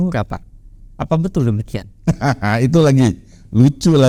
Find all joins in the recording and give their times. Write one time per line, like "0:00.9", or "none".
none